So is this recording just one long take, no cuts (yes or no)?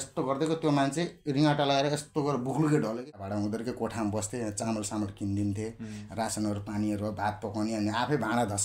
no